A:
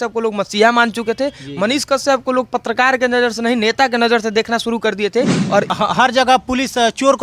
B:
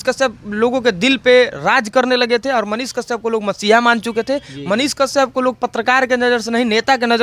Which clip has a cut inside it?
A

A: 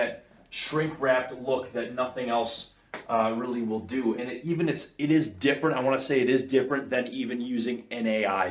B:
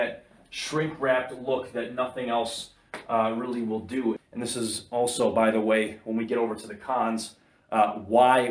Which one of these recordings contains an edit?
B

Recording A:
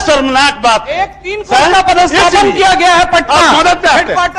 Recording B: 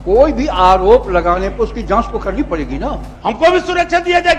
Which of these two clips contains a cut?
B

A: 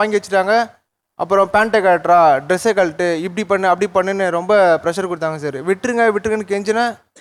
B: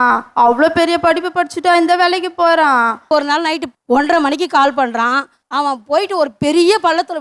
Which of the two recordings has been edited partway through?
B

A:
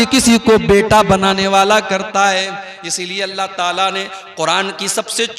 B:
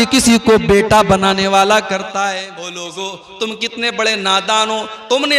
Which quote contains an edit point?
B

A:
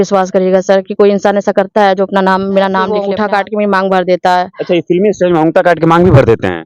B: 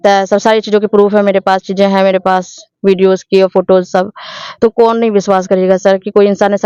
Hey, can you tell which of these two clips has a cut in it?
A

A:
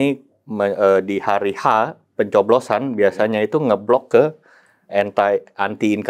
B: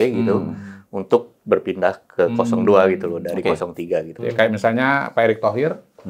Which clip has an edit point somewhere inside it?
B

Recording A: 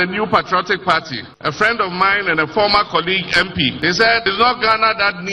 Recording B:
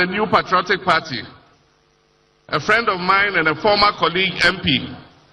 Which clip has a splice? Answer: A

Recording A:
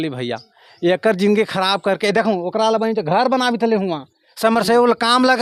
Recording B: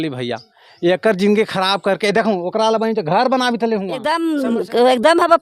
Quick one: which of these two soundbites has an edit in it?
B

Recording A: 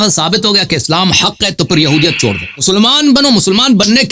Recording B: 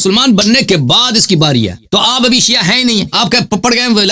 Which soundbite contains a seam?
B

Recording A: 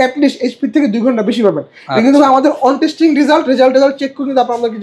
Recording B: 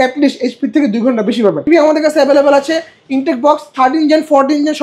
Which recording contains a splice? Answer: B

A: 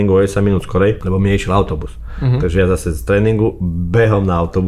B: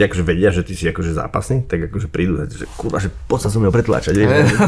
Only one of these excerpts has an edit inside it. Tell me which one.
A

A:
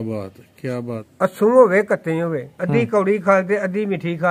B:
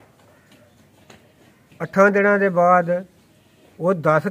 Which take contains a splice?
A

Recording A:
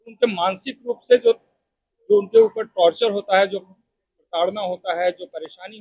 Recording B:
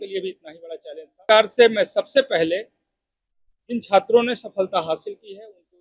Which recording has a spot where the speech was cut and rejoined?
B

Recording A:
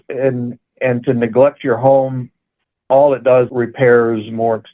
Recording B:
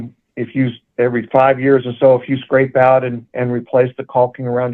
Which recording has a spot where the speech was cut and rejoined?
A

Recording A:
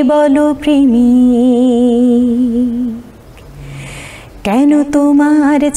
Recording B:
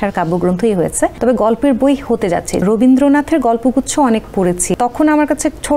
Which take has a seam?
B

